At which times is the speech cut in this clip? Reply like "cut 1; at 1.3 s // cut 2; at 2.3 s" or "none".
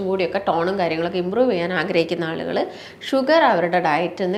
none